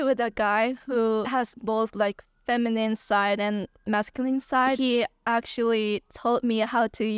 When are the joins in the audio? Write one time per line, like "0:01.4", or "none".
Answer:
0:04.8